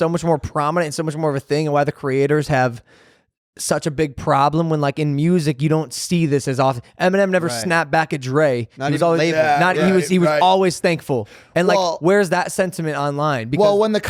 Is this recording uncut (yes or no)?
yes